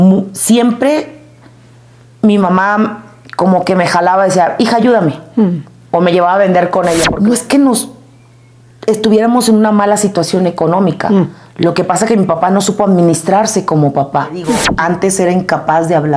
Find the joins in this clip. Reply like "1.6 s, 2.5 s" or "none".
7.1 s, 14.6 s